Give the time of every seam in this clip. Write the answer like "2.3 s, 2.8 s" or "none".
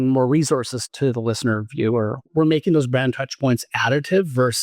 0.9 s, 2.3 s